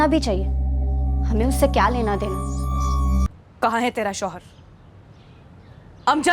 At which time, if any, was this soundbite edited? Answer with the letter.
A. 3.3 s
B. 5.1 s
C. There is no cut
A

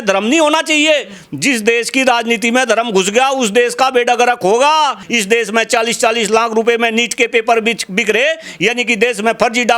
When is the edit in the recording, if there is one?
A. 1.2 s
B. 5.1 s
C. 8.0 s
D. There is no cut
B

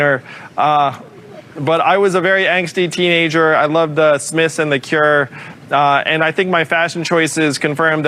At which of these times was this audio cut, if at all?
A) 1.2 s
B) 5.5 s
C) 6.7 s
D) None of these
D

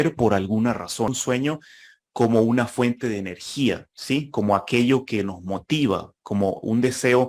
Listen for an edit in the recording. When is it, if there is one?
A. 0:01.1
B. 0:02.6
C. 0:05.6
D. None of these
A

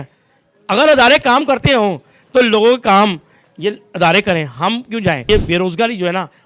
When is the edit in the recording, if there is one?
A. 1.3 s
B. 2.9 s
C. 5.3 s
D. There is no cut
C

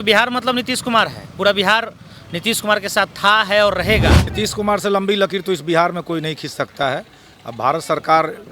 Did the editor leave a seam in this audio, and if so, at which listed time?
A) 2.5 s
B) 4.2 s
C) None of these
B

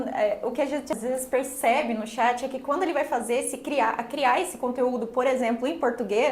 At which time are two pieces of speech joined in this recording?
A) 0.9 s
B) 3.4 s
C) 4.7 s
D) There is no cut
A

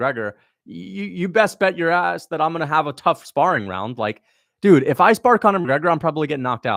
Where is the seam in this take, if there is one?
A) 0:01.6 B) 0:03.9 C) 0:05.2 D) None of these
D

